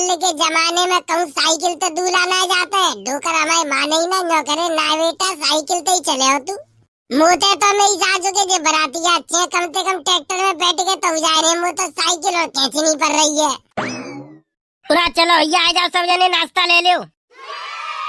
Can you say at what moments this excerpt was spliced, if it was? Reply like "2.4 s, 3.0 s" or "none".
13.7 s